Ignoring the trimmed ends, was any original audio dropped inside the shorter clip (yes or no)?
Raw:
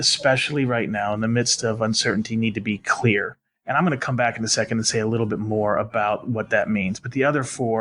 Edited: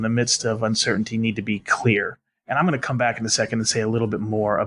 no